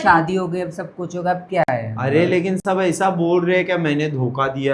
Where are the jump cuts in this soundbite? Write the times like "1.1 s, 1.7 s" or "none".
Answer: none